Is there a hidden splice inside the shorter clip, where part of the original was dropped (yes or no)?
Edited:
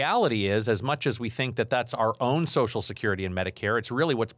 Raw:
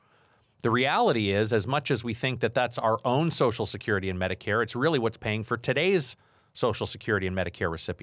no